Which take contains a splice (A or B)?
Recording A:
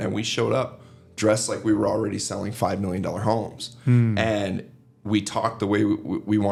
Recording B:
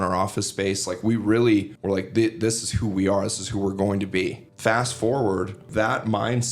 B